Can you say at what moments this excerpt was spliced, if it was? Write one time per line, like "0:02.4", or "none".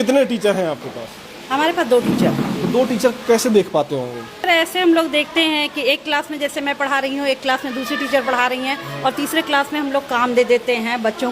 0:04.5